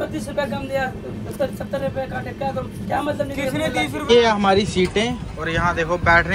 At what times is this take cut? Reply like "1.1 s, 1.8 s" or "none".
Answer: 4.0 s